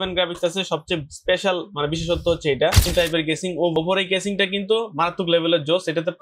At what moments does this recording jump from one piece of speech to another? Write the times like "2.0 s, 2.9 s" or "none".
2.9 s, 3.8 s